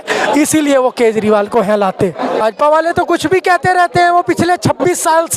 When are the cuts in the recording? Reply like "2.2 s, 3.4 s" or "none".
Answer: 2.4 s